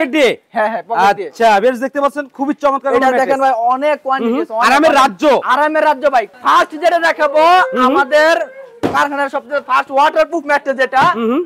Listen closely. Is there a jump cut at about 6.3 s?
yes; 1 cut; at 6.3 s

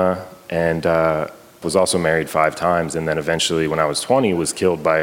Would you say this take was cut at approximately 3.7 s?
no; 1 cut; at 1.6 s

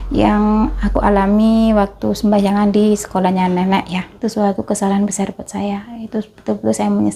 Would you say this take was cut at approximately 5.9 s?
no; 1 cut; at 4.1 s

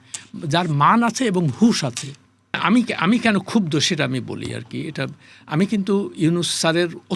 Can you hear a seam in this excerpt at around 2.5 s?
yes; 1 cut; at 2.5 s

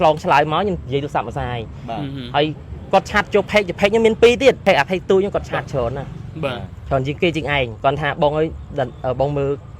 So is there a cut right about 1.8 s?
no; 2 cuts; at 4.6 s, 7.7 s

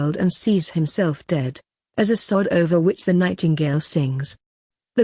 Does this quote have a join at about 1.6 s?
yes; 1 cut; at 1.6 s

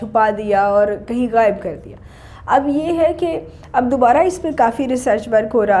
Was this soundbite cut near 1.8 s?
no; 0 cuts

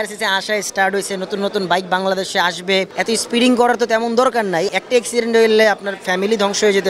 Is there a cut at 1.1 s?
no; 2 cuts; at 2.9 s, 4.7 s

